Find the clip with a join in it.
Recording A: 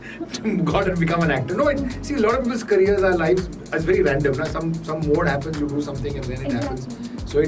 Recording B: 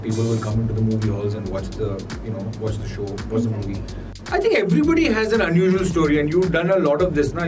B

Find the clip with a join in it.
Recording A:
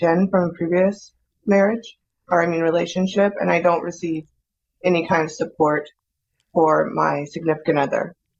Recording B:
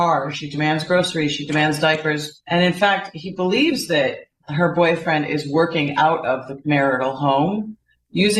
B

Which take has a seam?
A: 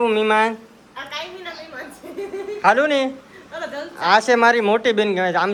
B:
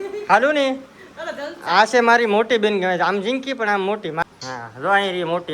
B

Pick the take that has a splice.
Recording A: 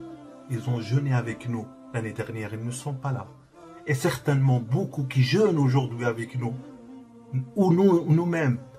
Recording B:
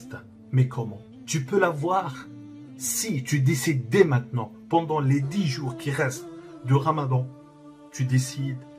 B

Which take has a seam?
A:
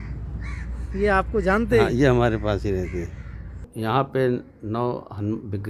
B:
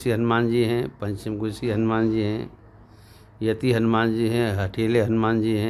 A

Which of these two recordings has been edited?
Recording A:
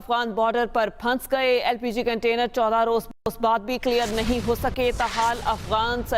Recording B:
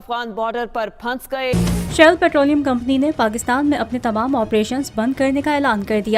B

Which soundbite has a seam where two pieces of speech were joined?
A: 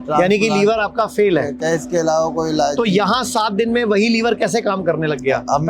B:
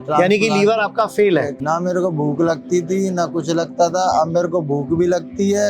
B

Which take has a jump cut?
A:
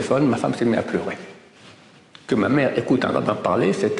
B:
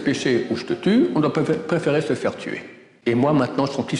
B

